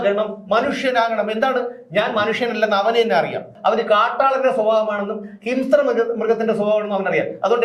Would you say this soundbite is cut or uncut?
cut